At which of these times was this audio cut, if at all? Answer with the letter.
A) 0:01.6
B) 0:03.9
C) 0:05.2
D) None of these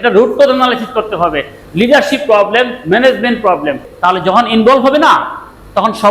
B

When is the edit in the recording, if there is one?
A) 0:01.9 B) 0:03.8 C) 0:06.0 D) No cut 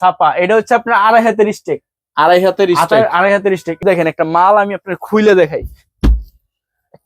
B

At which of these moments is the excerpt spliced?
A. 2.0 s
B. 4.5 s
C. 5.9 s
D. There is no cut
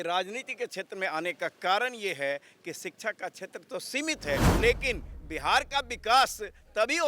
B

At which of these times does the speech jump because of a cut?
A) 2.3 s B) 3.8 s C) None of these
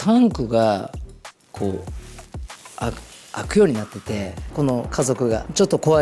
C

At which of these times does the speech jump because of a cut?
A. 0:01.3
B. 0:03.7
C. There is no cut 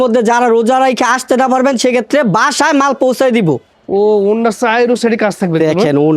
B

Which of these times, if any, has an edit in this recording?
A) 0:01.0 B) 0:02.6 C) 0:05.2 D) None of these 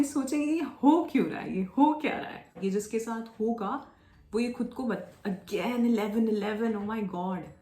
B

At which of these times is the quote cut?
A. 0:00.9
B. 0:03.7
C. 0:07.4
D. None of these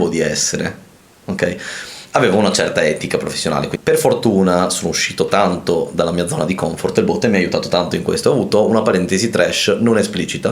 B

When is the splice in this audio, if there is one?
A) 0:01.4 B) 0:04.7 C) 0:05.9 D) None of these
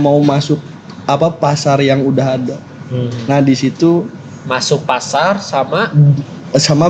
D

